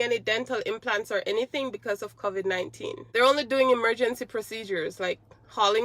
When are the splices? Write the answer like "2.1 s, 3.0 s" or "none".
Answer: 3.1 s